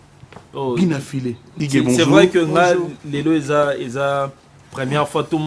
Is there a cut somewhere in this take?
yes; 1 cut; at 1.5 s

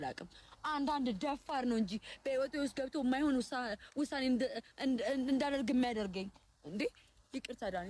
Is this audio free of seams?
yes; 0 cuts

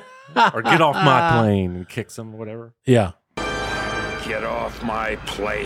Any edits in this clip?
no; 0 cuts

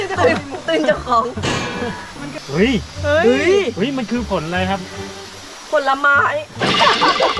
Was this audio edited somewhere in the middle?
yes; 1 cut; at 2.3 s

